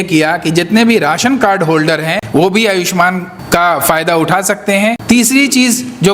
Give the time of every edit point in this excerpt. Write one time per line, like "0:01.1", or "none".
0:02.2
0:03.3
0:05.0

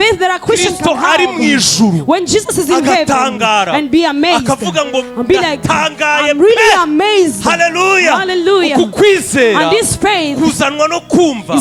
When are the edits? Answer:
none

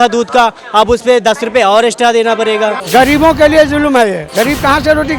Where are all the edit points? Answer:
0:02.8
0:04.2

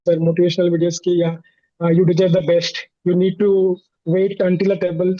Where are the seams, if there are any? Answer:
none

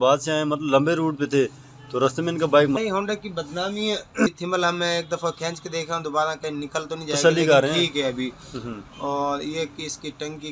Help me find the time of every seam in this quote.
0:02.8
0:04.3

